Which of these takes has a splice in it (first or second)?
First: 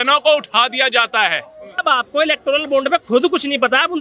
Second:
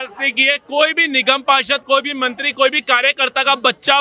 first